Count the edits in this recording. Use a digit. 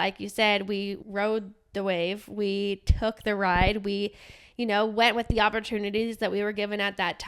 1